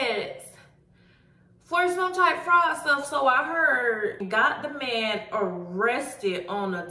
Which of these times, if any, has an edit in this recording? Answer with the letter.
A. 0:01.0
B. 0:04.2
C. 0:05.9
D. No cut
B